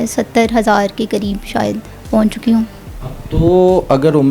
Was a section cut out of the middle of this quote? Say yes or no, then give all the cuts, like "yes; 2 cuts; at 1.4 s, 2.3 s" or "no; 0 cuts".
no; 0 cuts